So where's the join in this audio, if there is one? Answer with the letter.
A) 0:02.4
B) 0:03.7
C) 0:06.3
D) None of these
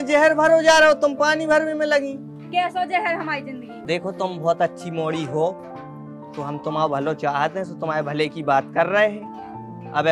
B